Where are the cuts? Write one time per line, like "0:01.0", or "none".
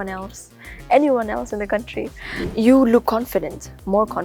0:02.4